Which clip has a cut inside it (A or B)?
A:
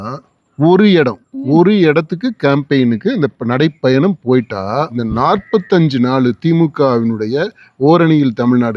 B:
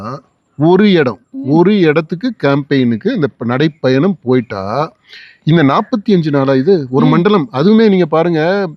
A